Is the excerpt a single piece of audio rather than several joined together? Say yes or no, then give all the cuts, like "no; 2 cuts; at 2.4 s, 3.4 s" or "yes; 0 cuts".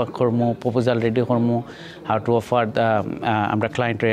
yes; 0 cuts